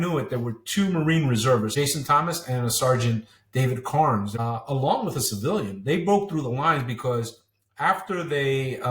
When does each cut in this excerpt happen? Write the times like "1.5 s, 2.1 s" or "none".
1.7 s, 4.3 s

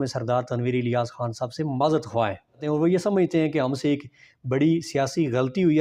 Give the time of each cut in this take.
2.6 s

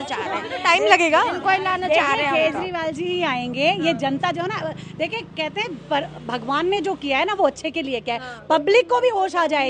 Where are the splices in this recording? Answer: none

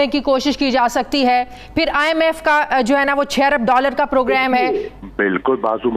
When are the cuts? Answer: 5.0 s

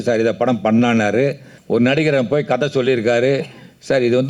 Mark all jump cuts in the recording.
1.5 s

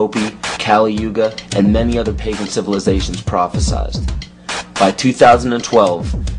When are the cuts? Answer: none

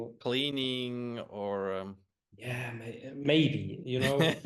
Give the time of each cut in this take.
none

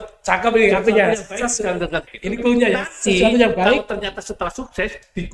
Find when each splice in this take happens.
2.1 s

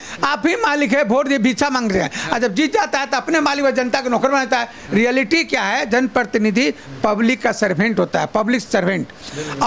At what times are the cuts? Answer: none

